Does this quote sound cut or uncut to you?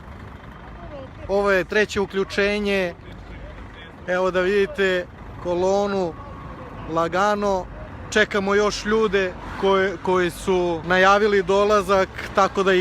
cut